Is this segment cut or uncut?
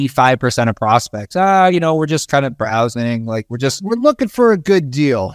uncut